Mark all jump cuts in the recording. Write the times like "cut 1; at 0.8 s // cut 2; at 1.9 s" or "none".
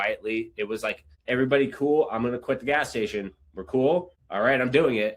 cut 1; at 1.1 s // cut 2; at 4.2 s